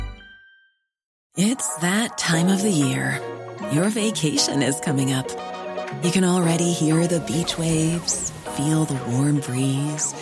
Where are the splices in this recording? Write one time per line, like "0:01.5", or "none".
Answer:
0:01.2